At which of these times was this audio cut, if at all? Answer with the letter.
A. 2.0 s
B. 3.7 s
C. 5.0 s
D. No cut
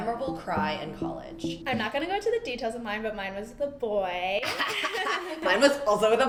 D